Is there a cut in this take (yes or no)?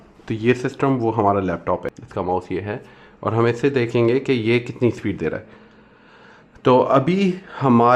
yes